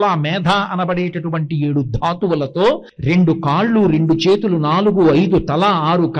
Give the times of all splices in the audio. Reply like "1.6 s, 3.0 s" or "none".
2.9 s